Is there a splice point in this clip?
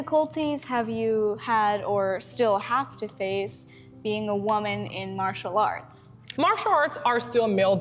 no; 0 cuts

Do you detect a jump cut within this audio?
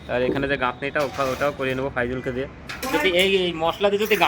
yes; 1 cut; at 2.9 s

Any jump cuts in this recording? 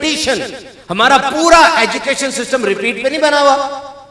no; 0 cuts

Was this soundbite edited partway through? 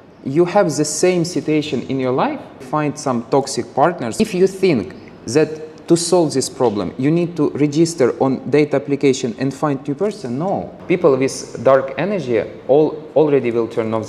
yes; 3 cuts; at 2.7 s, 4.2 s, 10.7 s

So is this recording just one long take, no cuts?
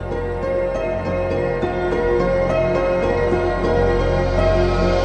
yes; 0 cuts

